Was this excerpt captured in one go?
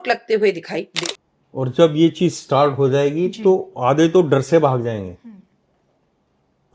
no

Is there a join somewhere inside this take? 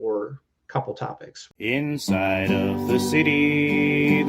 yes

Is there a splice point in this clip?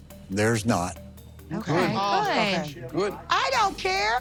no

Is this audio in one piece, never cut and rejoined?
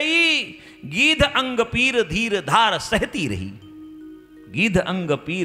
yes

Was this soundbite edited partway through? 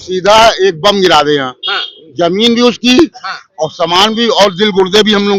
no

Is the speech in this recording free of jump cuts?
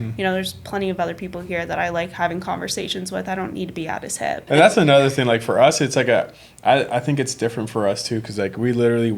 no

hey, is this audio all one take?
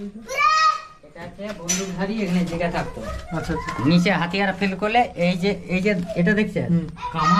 yes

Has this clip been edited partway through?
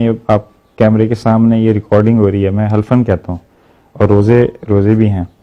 no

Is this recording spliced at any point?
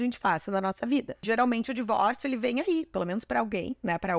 yes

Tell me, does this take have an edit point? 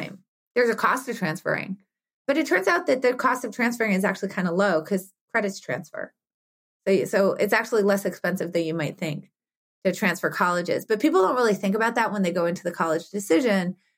yes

